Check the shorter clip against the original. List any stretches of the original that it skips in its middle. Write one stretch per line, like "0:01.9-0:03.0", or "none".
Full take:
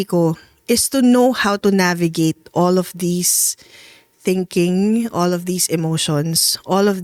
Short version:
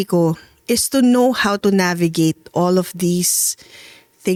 none